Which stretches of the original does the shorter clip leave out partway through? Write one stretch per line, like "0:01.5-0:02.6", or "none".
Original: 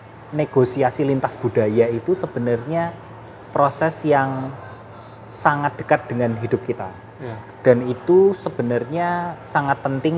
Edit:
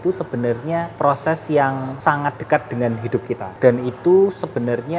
0:02.9-0:03.4
0:04.5-0:05.3
0:06.9-0:07.5